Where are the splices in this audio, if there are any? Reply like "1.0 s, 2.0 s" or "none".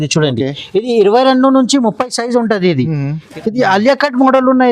3.3 s